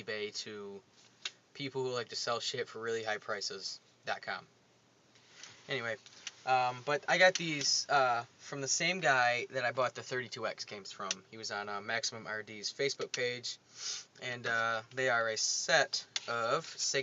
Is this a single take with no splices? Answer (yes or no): no